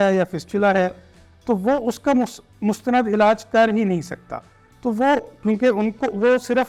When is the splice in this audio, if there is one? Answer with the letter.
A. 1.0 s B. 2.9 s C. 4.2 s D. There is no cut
D